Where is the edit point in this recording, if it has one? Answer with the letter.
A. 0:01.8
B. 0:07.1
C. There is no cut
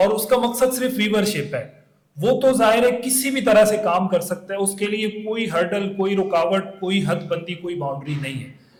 C